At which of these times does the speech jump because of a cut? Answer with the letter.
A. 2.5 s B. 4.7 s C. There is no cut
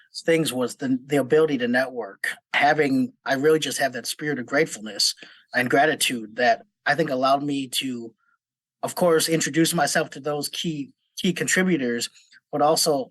A